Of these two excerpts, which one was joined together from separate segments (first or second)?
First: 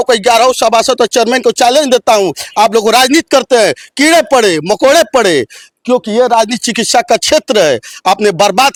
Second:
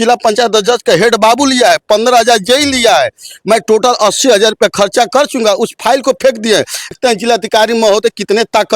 second